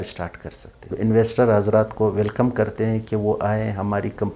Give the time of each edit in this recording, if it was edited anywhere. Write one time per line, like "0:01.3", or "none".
0:00.9